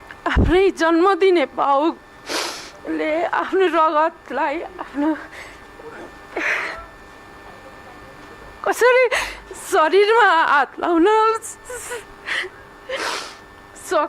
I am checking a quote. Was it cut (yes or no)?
yes